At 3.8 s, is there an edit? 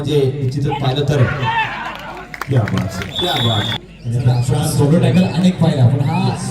yes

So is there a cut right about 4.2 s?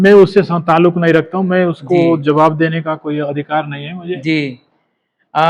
no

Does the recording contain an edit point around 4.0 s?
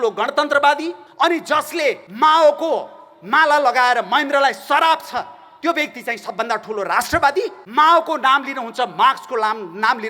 no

